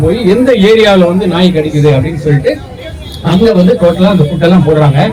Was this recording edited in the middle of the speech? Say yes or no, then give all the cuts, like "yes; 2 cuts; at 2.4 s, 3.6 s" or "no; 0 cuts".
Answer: no; 0 cuts